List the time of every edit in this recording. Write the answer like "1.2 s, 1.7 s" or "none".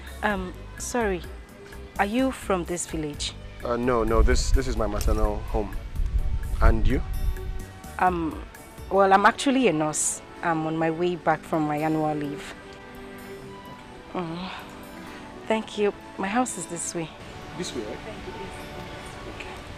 none